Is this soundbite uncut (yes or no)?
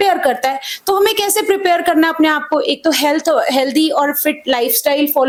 yes